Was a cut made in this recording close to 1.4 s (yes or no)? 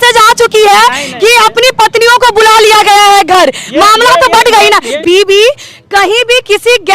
no